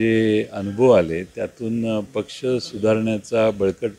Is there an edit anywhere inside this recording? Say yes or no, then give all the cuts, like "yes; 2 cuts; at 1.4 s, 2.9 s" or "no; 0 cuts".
no; 0 cuts